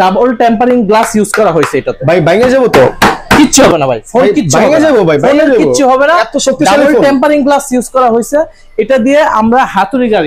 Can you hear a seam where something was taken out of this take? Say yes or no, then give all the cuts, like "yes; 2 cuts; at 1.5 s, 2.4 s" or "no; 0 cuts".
no; 0 cuts